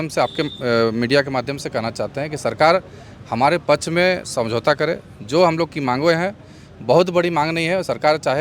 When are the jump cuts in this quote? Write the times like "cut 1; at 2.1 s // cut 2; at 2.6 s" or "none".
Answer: none